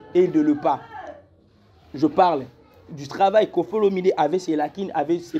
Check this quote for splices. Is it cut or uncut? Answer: uncut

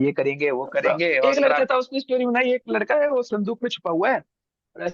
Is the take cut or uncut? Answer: cut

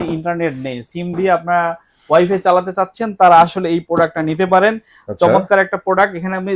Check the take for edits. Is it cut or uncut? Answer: uncut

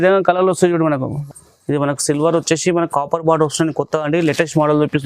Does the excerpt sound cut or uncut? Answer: cut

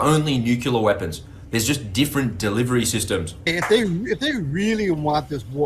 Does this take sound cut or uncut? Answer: cut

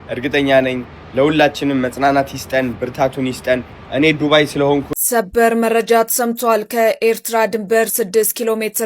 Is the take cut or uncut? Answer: cut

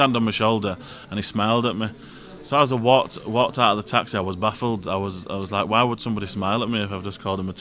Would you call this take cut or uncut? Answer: uncut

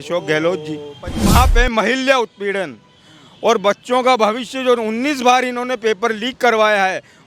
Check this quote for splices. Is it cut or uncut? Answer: cut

